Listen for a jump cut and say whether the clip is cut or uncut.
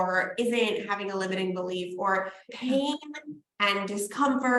cut